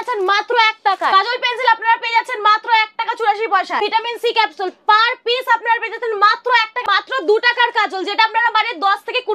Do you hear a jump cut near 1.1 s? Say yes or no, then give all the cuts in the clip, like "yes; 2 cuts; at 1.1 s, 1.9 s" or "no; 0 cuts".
yes; 3 cuts; at 1.1 s, 3.8 s, 6.8 s